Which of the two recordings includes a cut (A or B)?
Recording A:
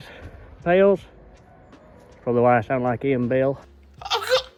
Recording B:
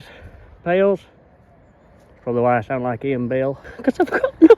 B